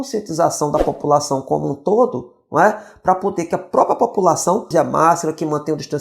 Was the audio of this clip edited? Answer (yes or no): no